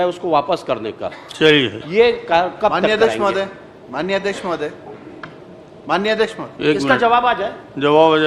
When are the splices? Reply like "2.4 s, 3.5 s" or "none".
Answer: none